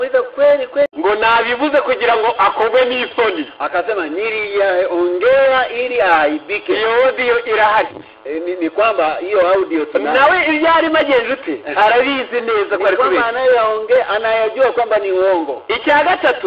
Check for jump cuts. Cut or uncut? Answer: cut